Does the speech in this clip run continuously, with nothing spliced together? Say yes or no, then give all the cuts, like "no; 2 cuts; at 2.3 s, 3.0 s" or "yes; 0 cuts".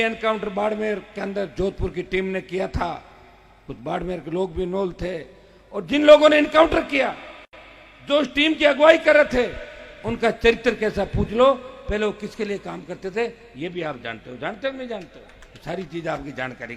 yes; 0 cuts